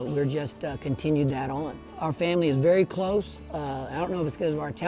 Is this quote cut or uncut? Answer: cut